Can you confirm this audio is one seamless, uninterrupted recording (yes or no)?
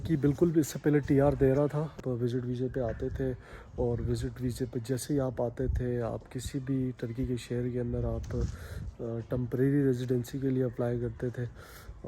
no